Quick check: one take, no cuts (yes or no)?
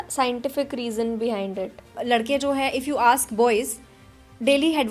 no